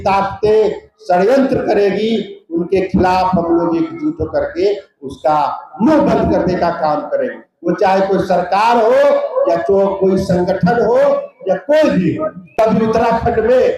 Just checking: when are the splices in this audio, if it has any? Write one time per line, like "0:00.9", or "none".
0:12.4